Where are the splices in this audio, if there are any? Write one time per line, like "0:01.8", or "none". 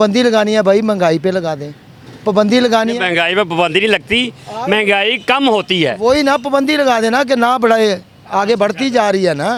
none